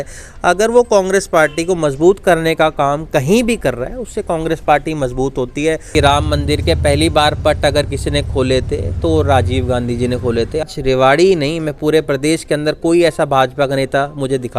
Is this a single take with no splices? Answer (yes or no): no